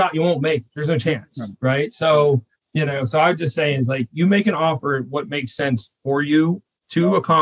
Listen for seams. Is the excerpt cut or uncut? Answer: cut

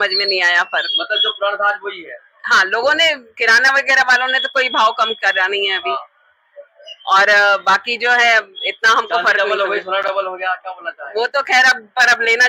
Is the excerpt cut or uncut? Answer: uncut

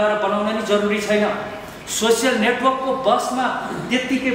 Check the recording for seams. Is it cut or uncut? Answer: uncut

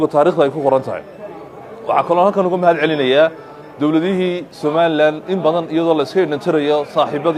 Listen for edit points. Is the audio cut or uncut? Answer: uncut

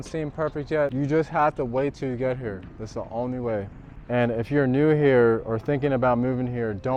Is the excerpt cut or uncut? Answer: cut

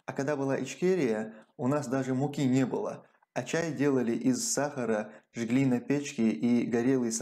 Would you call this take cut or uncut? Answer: uncut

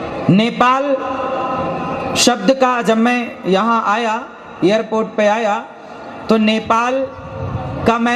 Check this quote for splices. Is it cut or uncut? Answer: uncut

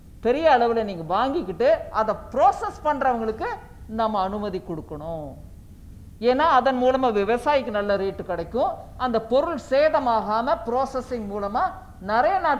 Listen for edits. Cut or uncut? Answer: uncut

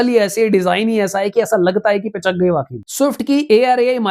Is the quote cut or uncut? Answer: cut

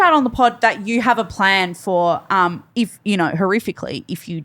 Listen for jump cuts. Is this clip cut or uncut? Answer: uncut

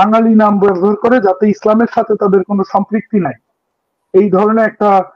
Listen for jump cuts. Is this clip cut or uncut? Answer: uncut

